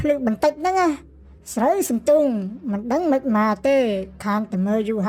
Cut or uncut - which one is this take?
uncut